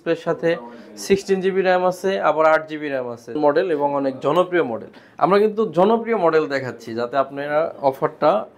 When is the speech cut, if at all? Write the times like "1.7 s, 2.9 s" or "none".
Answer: 3.4 s